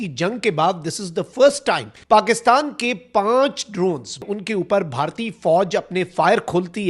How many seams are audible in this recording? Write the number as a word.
two